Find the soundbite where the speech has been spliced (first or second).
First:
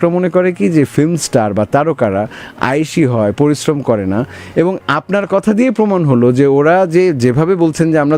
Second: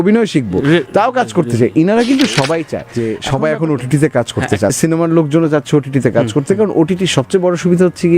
second